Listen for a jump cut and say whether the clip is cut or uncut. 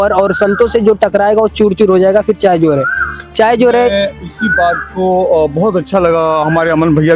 uncut